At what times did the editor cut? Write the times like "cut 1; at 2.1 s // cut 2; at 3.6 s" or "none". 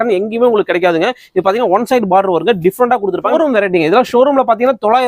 cut 1; at 3.3 s